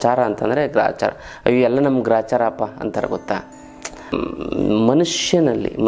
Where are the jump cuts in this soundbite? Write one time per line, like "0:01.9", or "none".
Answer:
0:04.1